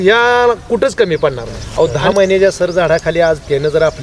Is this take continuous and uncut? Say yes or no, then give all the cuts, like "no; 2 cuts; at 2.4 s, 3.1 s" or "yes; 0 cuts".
no; 1 cut; at 1.5 s